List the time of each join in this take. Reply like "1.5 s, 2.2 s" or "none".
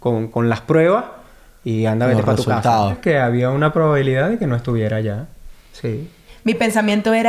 3.0 s, 6.3 s